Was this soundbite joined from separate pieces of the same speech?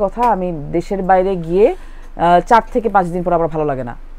no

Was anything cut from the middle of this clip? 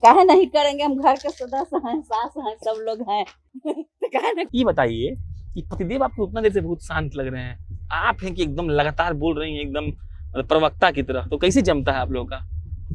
yes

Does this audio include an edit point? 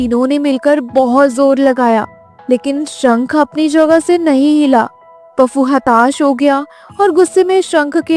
no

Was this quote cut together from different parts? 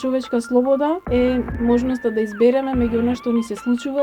yes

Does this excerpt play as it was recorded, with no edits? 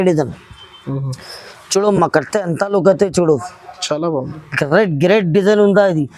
yes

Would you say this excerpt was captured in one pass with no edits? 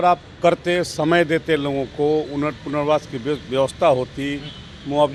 yes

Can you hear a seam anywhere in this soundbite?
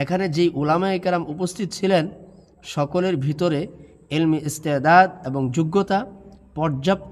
no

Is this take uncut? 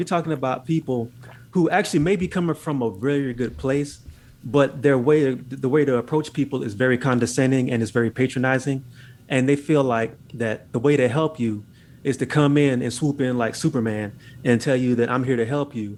yes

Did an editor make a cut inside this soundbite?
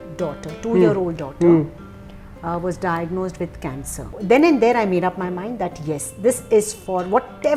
yes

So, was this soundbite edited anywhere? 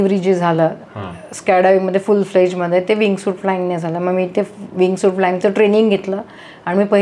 no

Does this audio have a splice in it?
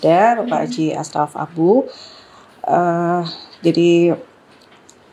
no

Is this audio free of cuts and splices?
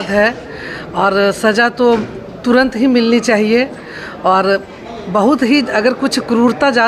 yes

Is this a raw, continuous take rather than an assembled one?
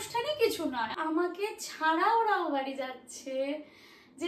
no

